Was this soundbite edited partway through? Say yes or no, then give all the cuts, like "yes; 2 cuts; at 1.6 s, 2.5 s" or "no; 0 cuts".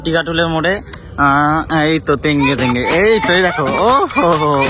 no; 0 cuts